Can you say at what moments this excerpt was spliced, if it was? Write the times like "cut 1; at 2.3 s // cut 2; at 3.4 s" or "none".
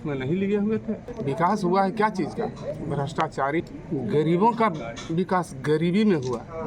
cut 1; at 1.1 s // cut 2; at 3.8 s